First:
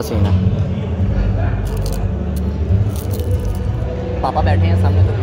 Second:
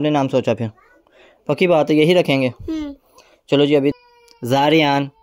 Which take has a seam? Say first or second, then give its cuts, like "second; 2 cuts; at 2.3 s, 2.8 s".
second; 1 cut; at 3.9 s